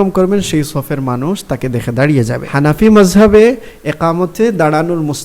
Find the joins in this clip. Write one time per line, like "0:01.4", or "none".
0:02.5